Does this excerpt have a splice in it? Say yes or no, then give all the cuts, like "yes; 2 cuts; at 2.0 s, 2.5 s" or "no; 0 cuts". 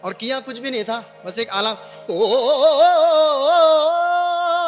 no; 0 cuts